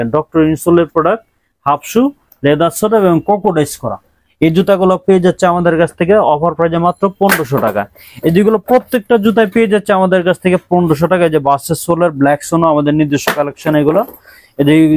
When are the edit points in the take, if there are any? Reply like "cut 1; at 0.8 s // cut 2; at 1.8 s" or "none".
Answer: none